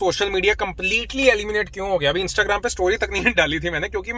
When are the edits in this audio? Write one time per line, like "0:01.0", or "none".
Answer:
none